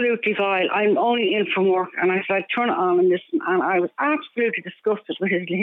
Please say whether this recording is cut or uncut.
uncut